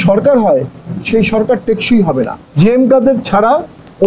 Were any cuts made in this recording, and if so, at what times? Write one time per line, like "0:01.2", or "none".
0:02.4